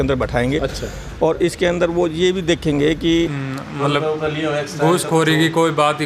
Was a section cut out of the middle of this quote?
yes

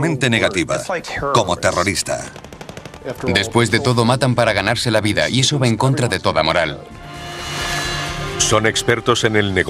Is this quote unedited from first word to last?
yes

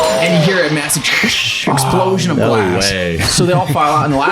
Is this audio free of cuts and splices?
no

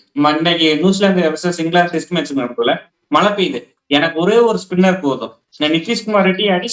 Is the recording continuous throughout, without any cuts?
yes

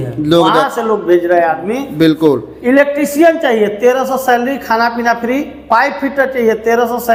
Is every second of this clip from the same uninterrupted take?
yes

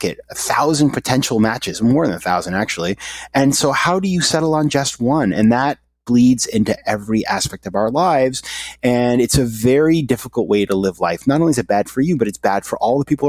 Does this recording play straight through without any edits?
yes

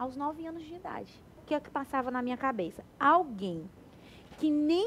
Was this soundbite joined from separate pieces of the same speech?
yes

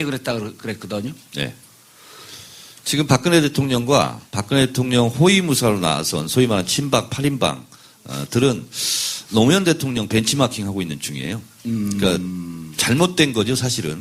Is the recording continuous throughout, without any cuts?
no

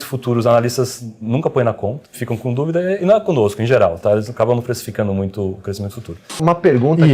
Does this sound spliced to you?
yes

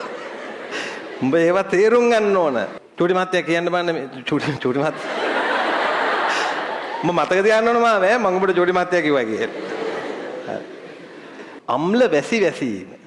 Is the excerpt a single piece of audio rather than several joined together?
no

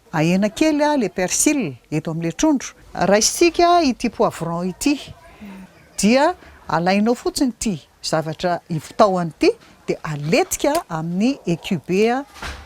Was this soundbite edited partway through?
yes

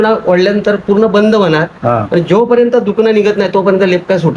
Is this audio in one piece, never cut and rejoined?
yes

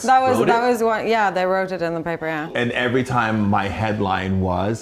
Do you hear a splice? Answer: yes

